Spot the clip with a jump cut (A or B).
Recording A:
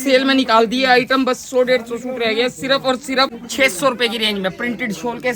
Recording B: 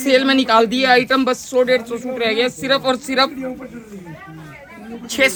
A